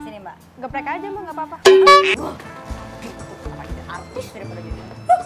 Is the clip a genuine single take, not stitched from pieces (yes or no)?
no